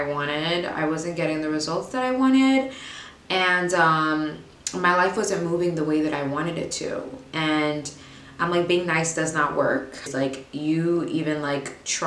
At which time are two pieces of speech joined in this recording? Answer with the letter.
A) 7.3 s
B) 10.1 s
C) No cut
B